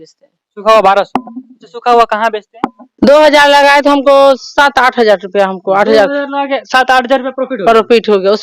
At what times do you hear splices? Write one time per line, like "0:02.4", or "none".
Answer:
0:02.9